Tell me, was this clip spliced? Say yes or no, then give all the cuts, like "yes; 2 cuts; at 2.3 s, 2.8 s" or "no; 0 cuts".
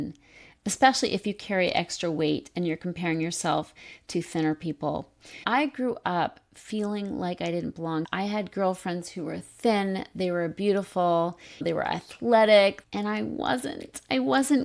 yes; 2 cuts; at 11.6 s, 12.8 s